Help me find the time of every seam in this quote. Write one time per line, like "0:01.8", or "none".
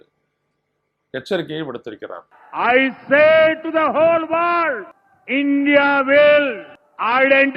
0:02.3

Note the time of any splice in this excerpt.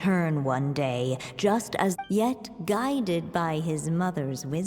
0:02.0

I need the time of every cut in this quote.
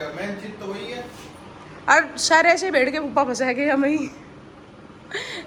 none

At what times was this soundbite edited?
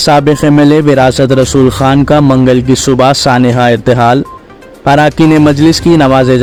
none

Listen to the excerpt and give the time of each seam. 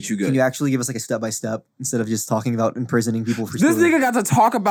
none

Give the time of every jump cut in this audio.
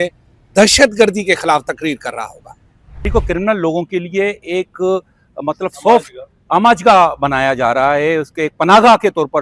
0:03.1

